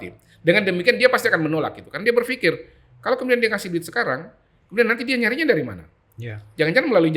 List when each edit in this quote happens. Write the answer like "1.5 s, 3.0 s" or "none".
none